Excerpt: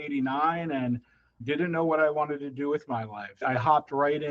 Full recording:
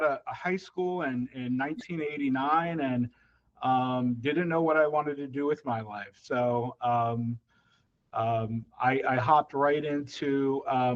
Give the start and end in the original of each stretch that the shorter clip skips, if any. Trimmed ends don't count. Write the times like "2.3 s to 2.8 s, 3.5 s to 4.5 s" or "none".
3.5 s to 4.2 s, 6.2 s to 9.0 s